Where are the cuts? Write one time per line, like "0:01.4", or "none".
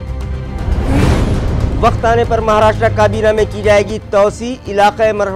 none